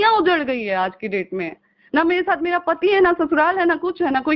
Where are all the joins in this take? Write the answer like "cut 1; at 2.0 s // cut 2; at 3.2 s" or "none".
none